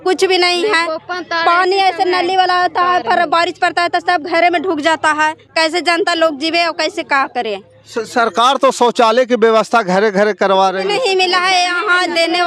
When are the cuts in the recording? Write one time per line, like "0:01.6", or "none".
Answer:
none